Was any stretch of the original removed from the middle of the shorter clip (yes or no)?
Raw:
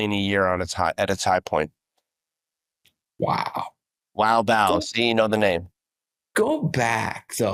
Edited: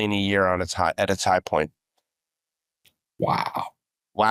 no